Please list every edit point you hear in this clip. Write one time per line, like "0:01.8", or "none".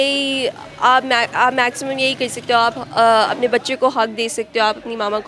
none